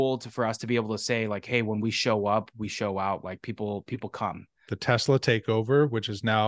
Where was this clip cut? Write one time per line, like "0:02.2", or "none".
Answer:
0:04.7